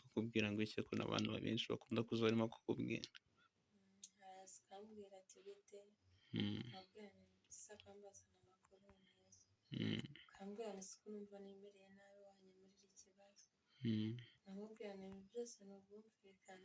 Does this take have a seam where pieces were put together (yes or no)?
no